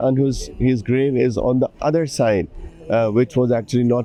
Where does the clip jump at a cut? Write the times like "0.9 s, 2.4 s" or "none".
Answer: none